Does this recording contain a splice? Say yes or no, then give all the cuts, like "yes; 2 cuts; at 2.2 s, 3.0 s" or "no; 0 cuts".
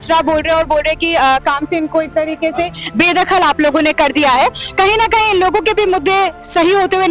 no; 0 cuts